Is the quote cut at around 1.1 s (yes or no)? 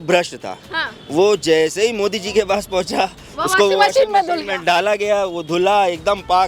no